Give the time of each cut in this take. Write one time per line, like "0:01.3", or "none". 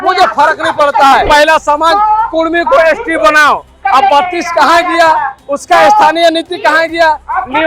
0:01.3